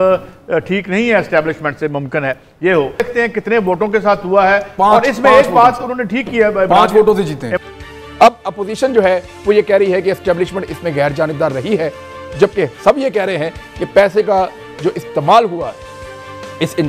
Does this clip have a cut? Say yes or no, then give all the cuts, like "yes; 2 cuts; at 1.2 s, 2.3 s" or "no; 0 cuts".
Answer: no; 0 cuts